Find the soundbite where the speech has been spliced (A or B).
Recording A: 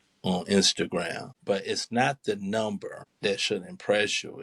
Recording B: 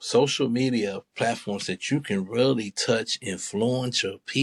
A